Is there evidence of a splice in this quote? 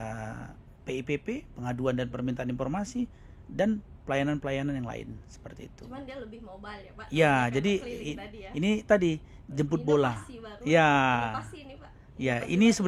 no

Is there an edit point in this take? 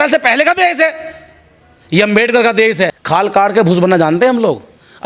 yes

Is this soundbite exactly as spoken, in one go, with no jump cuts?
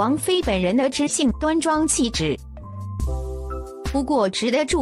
no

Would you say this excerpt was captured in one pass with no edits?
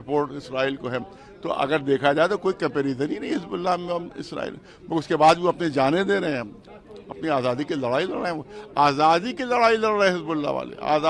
yes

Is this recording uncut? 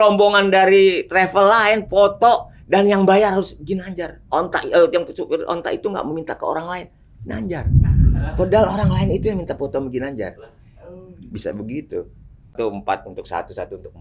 no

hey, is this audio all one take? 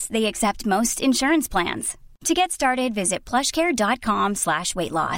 yes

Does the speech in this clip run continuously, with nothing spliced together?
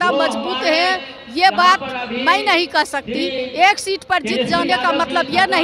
yes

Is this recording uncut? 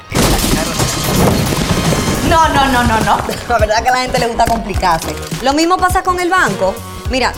yes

